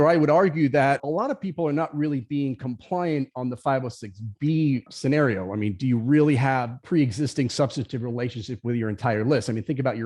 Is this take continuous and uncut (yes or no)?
no